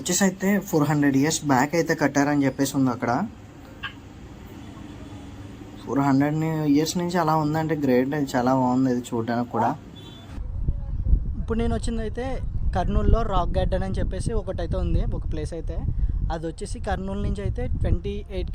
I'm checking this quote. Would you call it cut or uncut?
cut